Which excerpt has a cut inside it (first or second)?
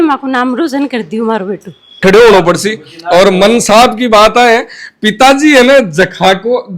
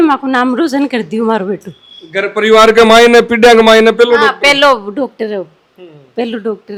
first